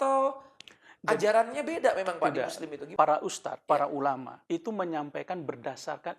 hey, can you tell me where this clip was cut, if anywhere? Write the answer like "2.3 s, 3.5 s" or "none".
2.8 s, 3.5 s, 4.3 s